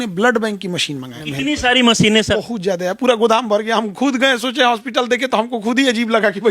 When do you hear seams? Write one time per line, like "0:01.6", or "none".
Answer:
0:01.2
0:02.3